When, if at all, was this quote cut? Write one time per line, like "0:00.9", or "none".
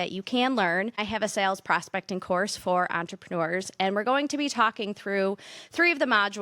0:01.0